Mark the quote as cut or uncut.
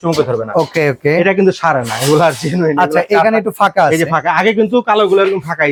uncut